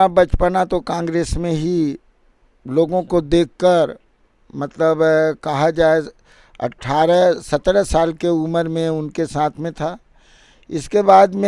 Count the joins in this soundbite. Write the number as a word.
zero